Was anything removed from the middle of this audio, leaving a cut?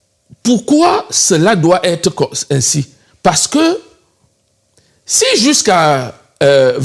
no; 0 cuts

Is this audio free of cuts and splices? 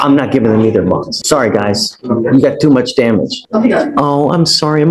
no; 2 cuts; at 1.2 s, 3.4 s

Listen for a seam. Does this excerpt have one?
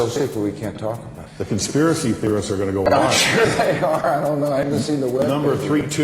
yes; 1 cut; at 1.1 s

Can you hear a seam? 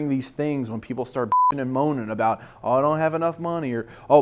no; 0 cuts

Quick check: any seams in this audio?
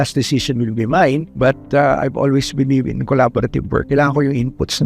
yes; 2 cuts; at 1.3 s, 3.9 s

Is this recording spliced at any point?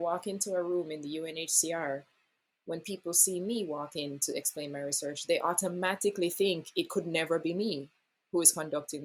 no; 0 cuts

